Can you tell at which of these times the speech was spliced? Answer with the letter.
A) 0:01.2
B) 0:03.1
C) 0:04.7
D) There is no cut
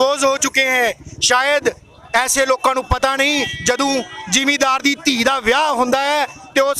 D